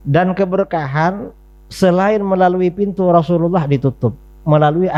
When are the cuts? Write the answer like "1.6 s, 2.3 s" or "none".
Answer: none